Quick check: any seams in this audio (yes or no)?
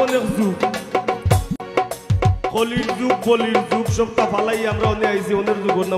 yes